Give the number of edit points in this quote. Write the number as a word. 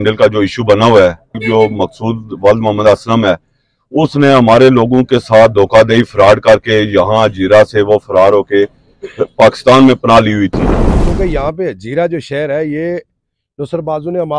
two